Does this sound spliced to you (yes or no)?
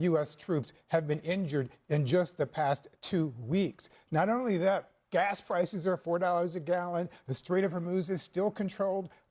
no